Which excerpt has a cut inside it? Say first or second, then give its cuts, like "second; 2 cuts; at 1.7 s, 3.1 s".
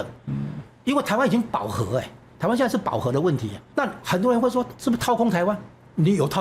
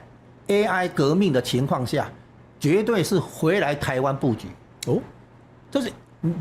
first; 2 cuts; at 3.6 s, 4.7 s